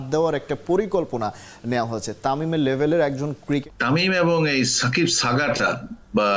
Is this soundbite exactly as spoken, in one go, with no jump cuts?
no; 1 cut; at 3.6 s

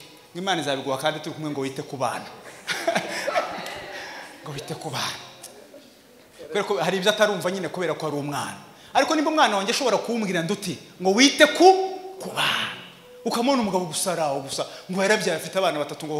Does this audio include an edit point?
no; 0 cuts

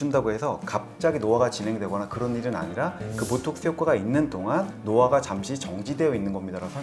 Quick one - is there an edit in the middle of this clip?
no; 0 cuts

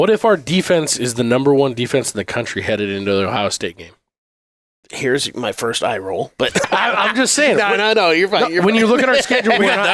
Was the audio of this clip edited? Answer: no; 0 cuts

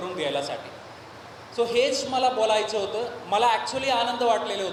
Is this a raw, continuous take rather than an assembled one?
yes; 0 cuts

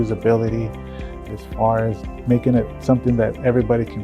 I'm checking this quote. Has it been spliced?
yes; 2 cuts; at 1.2 s, 2.2 s

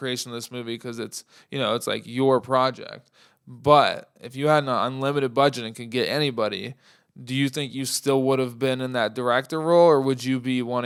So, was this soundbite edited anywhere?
no; 0 cuts

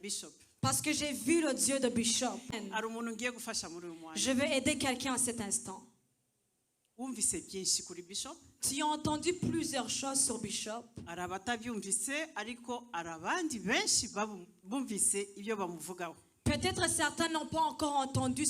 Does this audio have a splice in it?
yes; 1 cut; at 2.5 s

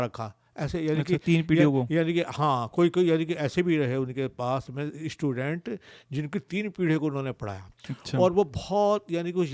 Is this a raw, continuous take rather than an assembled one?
yes; 0 cuts

